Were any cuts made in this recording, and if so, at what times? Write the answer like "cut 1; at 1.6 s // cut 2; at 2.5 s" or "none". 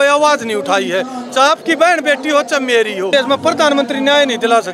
cut 1; at 3.1 s